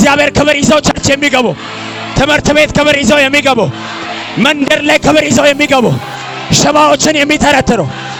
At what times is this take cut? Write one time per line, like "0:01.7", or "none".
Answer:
none